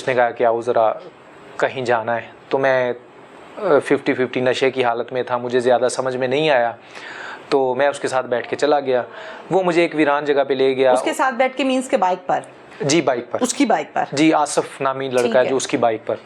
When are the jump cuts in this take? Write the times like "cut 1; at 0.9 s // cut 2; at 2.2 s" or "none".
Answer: none